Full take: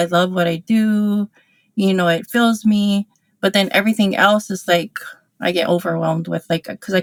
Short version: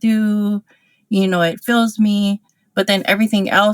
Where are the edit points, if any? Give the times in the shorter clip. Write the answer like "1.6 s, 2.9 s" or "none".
none